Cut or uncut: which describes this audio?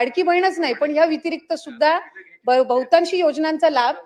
uncut